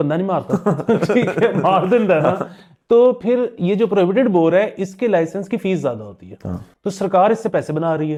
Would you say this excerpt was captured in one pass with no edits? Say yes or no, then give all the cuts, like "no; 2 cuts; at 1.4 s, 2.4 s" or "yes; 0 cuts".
yes; 0 cuts